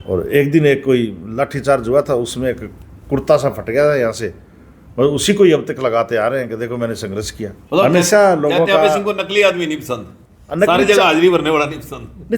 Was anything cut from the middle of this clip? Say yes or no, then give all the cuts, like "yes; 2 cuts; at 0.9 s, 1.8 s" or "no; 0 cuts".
yes; 1 cut; at 7.6 s